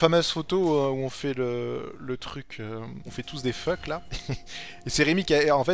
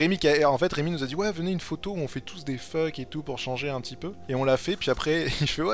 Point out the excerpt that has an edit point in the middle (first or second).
first